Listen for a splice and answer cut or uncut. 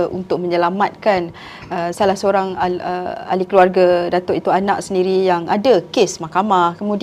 uncut